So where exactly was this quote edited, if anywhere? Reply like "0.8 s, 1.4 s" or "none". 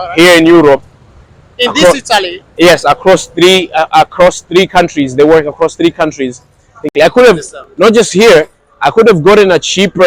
6.9 s